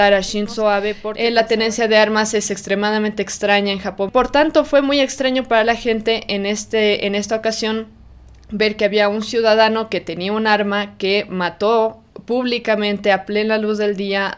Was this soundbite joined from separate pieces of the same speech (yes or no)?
yes